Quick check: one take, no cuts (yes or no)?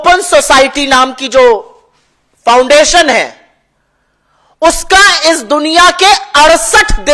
yes